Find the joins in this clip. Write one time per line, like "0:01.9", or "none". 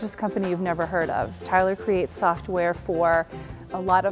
0:01.4